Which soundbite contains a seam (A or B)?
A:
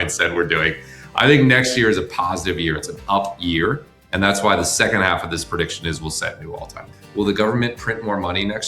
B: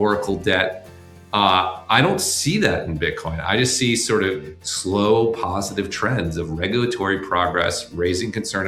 A